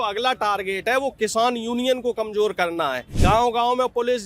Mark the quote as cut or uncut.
cut